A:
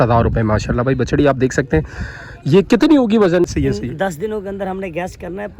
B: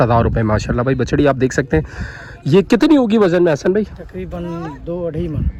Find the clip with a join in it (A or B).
A